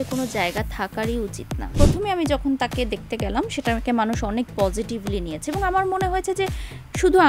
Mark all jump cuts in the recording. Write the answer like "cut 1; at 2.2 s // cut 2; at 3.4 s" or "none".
cut 1; at 1.6 s